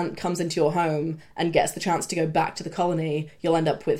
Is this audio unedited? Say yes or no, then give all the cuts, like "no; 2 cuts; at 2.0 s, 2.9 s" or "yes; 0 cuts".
yes; 0 cuts